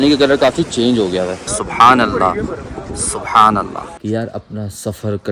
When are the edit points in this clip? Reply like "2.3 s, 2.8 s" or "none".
1.6 s, 3.9 s